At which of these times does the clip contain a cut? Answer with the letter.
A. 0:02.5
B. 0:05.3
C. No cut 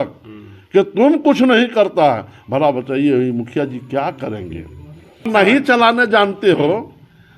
B